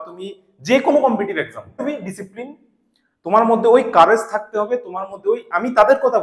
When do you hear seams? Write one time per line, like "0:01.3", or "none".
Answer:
0:01.8